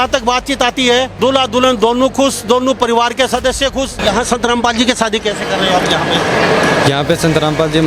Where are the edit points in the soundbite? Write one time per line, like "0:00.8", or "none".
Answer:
0:01.1
0:04.0